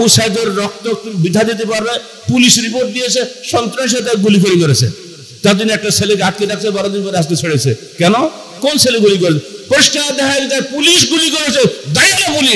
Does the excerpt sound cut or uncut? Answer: uncut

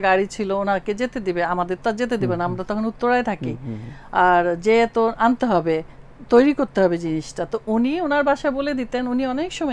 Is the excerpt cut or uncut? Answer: uncut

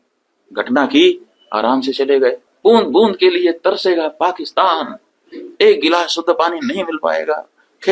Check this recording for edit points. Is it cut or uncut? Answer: cut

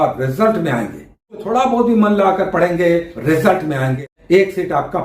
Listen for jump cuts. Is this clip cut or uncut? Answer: cut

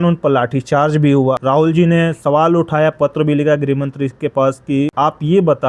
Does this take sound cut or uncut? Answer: cut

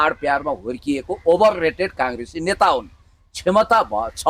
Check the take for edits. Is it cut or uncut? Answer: uncut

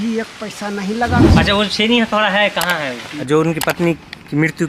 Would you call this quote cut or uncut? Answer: cut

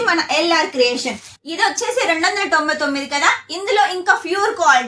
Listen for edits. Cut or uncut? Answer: cut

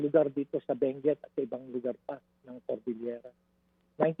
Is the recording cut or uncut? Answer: uncut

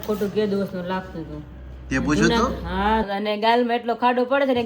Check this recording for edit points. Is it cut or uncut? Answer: cut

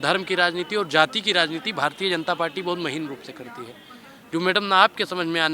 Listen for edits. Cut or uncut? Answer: uncut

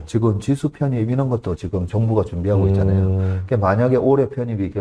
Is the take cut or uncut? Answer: uncut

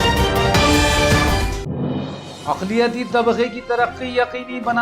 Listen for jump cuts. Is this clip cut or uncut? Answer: cut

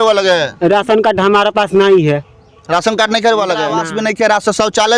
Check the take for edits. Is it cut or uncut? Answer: cut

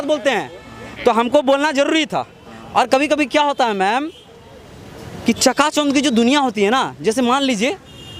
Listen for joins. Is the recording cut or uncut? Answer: uncut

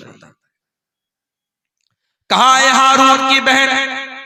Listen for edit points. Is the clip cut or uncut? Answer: uncut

